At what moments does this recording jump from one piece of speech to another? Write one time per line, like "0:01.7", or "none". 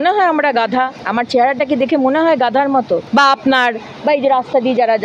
0:01.0
0:03.0